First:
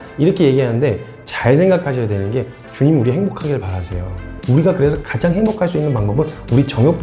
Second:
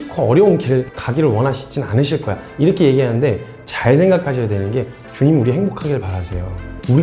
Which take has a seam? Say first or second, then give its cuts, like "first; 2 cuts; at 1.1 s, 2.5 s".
second; 1 cut; at 0.9 s